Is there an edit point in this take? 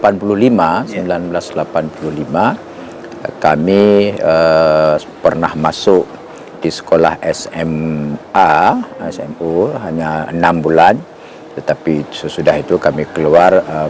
no; 0 cuts

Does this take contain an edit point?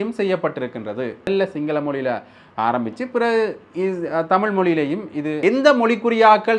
yes; 2 cuts; at 1.3 s, 5.3 s

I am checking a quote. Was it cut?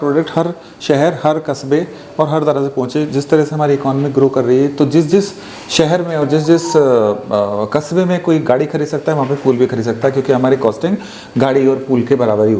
no; 0 cuts

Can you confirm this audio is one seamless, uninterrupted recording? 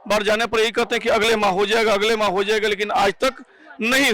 yes; 0 cuts

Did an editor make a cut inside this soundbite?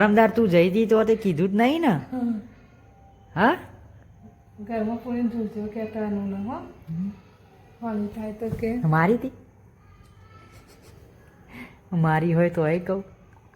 no; 0 cuts

